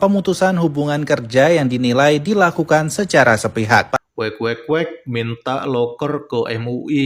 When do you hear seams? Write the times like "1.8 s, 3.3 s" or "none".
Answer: 3.9 s